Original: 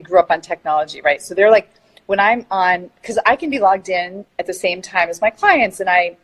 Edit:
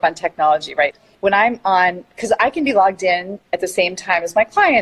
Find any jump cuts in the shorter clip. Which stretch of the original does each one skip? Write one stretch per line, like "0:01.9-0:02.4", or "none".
0:01.2-0:01.8